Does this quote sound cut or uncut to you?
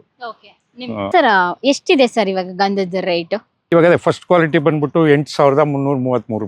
cut